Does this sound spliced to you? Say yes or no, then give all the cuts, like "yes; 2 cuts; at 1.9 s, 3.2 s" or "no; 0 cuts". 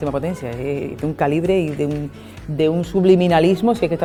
no; 0 cuts